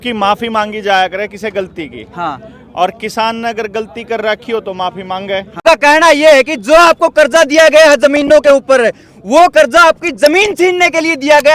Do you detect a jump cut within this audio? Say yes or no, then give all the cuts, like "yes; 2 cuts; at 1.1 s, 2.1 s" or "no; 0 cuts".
yes; 1 cut; at 5.6 s